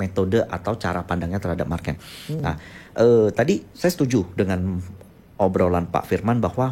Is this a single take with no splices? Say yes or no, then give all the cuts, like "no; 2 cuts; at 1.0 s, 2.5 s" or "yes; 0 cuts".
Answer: yes; 0 cuts